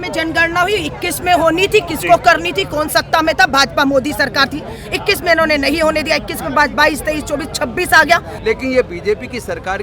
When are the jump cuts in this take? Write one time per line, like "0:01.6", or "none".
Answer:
0:08.3